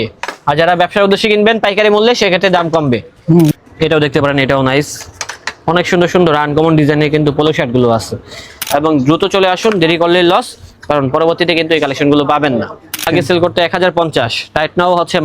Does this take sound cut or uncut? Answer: cut